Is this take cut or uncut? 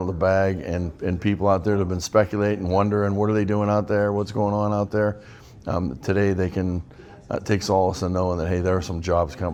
uncut